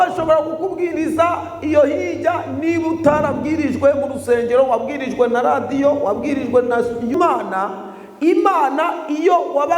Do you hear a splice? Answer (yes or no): yes